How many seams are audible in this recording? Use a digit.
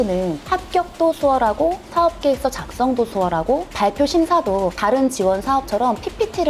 0